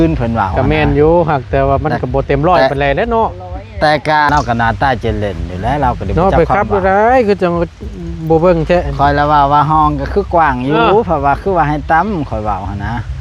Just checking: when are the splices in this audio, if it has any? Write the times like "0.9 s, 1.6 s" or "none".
4.3 s